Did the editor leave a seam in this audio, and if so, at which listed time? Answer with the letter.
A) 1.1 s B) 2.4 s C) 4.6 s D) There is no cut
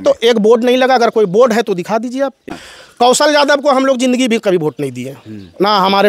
B